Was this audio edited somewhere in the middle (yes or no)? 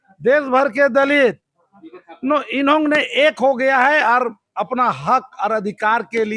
no